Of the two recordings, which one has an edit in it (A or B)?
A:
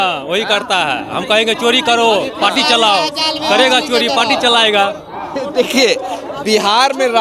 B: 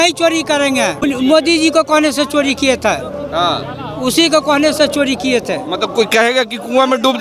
B